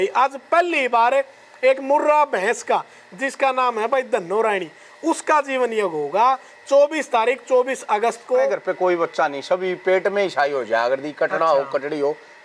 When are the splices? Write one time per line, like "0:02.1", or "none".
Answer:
0:08.6